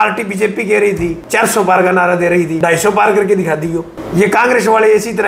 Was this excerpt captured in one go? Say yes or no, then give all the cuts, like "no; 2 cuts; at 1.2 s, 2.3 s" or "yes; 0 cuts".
no; 3 cuts; at 1.2 s, 2.5 s, 4.0 s